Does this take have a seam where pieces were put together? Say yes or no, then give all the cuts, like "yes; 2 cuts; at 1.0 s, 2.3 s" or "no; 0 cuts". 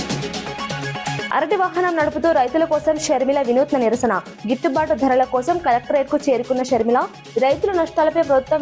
no; 0 cuts